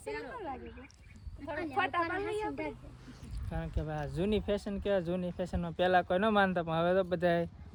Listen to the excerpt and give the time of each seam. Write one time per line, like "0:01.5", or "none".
none